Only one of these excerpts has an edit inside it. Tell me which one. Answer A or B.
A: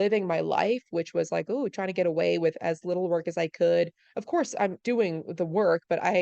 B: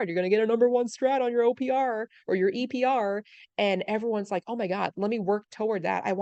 A